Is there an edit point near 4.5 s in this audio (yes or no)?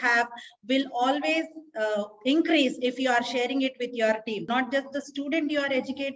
yes